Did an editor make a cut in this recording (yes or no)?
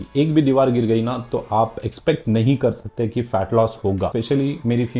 yes